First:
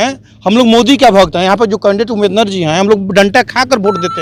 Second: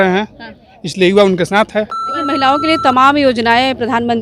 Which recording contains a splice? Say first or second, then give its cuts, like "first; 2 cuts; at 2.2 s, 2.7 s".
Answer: second; 1 cut; at 2.3 s